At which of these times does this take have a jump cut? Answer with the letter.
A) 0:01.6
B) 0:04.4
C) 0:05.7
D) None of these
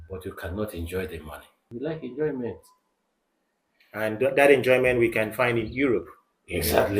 A